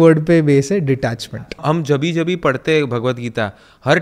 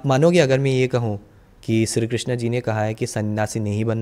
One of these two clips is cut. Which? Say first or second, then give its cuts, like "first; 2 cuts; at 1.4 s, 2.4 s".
first; 1 cut; at 1.6 s